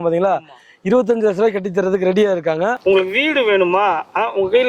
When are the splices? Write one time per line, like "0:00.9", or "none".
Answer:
0:02.8